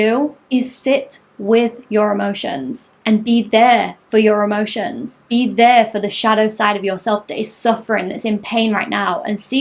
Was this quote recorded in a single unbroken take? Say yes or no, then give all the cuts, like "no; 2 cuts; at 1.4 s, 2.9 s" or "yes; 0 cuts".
yes; 0 cuts